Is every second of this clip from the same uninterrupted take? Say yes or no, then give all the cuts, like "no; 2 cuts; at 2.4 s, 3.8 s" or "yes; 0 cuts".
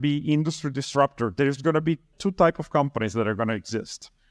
no; 1 cut; at 2.1 s